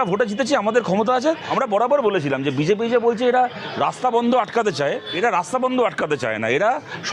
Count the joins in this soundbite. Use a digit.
2